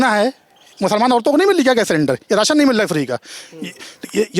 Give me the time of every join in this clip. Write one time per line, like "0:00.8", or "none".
none